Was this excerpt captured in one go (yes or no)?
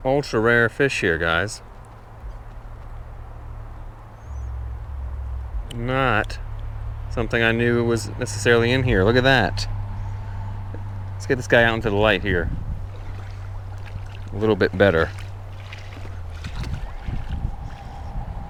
yes